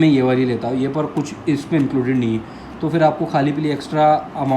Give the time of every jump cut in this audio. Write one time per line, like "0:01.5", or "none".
none